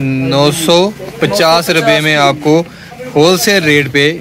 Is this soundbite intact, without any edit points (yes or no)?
yes